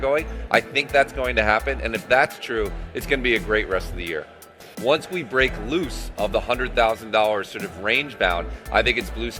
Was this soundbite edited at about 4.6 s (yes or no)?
yes